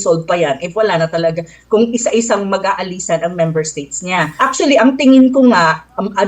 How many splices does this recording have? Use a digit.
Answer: 1